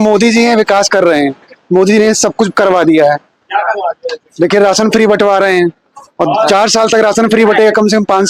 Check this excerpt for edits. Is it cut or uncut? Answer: uncut